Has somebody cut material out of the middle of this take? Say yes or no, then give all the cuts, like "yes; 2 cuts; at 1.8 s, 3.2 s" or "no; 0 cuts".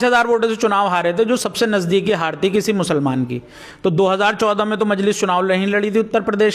no; 0 cuts